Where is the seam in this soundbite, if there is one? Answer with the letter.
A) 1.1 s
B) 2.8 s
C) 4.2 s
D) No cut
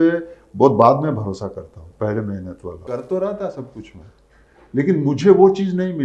B